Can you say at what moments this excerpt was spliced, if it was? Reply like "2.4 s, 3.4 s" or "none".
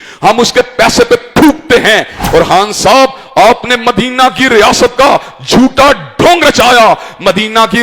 2.2 s